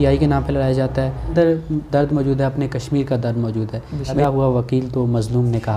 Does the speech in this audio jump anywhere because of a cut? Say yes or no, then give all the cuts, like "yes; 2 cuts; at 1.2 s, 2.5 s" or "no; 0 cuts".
yes; 2 cuts; at 1.3 s, 4.2 s